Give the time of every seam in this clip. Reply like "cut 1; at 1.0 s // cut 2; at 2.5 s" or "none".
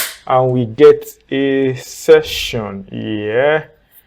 none